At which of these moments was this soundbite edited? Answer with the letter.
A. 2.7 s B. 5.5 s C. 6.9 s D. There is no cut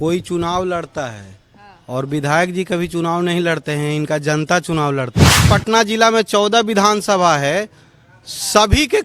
B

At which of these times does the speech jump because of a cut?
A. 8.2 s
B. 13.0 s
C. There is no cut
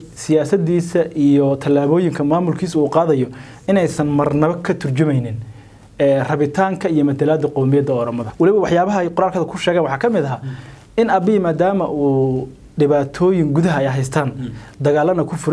A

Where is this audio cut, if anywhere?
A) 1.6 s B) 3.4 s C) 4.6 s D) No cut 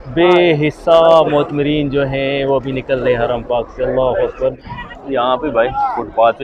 C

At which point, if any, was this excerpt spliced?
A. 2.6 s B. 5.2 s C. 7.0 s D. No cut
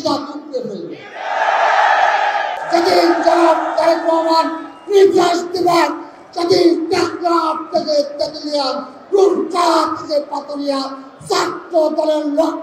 A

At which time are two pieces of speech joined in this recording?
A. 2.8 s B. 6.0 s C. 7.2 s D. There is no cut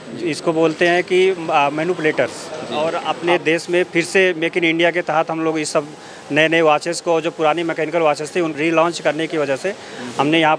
A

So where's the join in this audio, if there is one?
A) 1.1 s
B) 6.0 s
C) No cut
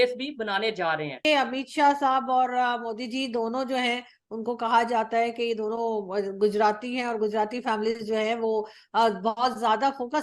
A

